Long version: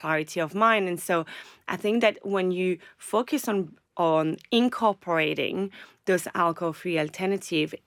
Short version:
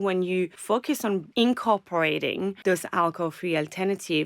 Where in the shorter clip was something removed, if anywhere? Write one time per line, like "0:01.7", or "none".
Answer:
0:01.1
0:02.6